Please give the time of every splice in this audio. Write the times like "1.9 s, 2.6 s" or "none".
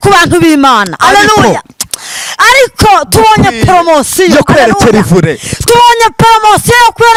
none